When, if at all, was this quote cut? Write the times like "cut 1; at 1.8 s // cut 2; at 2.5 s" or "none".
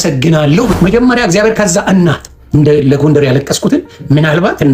cut 1; at 0.7 s // cut 2; at 2.3 s

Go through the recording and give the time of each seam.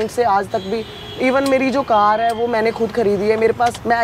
none

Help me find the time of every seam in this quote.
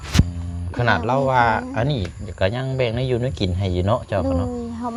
none

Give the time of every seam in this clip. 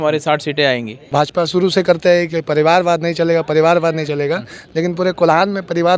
cut 1; at 1.1 s

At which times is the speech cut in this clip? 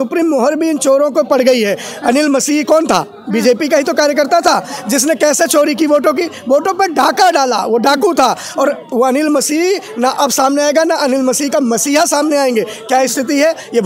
none

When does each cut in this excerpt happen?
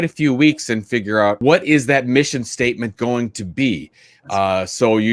cut 1; at 1.4 s

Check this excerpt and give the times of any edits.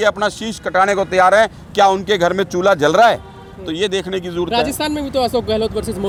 none

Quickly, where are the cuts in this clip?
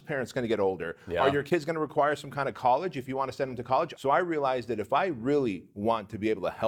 cut 1; at 3.9 s

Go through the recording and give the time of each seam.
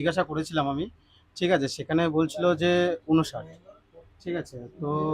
none

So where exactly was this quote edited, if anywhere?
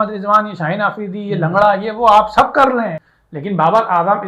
cut 1; at 3.0 s

